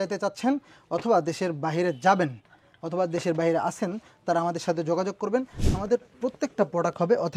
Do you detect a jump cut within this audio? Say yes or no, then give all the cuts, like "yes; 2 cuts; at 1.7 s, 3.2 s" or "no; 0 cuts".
no; 0 cuts